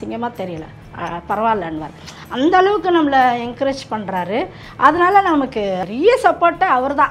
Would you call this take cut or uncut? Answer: cut